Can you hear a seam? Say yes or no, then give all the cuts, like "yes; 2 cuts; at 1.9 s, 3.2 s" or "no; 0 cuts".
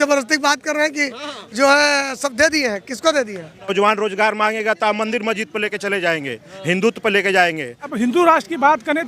yes; 2 cuts; at 3.7 s, 7.8 s